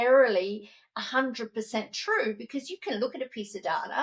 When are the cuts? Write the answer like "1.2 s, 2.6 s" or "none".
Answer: none